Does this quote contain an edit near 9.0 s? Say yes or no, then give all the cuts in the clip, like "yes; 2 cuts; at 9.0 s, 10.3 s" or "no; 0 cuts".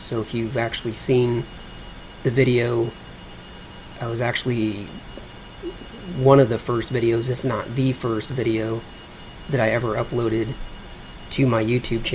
yes; 1 cut; at 9.0 s